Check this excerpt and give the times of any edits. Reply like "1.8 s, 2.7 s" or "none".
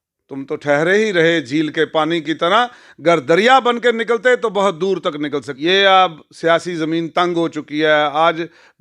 5.5 s